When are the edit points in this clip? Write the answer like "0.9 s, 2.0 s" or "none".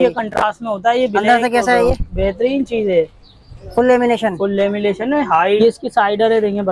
5.6 s